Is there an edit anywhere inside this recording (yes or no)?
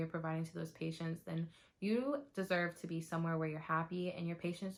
no